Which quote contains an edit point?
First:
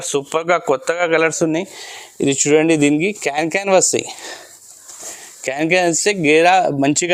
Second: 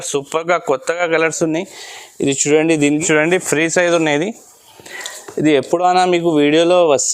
second; 1 cut; at 3.0 s

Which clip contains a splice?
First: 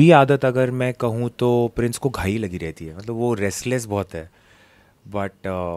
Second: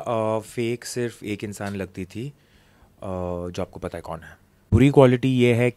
second; 1 cut; at 4.8 s

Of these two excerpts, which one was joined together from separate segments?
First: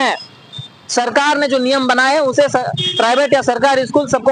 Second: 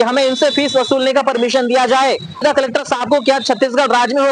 second; 1 cut; at 2.4 s

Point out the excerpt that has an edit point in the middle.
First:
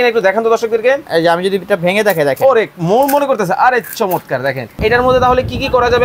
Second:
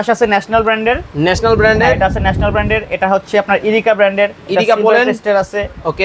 first; 1 cut; at 4.8 s

